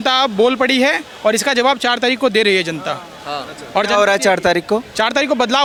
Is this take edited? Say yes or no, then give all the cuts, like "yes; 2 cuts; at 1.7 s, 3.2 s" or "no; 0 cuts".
no; 0 cuts